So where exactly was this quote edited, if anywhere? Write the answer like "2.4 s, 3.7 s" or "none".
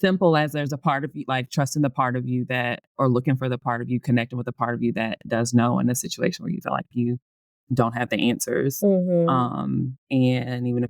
7.6 s